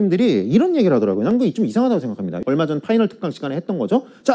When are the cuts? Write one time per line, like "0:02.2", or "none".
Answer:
0:02.4

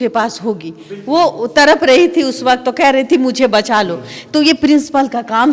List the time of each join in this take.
none

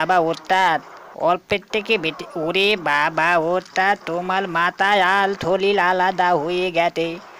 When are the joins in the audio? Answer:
none

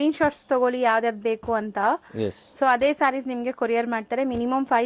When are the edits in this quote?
none

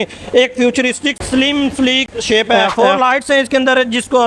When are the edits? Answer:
0:01.2
0:02.6

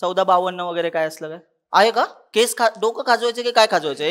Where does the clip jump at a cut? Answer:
0:02.2

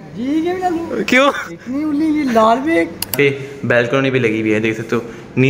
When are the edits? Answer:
0:03.1

